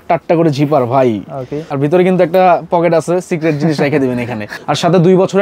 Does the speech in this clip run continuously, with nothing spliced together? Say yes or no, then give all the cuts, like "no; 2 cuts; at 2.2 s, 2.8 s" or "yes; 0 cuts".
no; 2 cuts; at 1.7 s, 4.4 s